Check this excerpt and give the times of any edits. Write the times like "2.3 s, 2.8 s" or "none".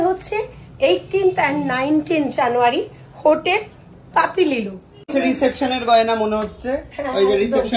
5.1 s